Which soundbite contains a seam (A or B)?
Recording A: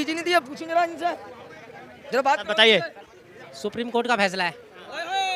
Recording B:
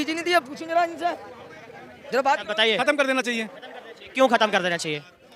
B